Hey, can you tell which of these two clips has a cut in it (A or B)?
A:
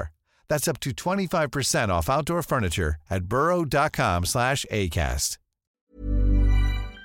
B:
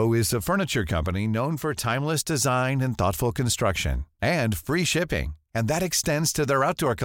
A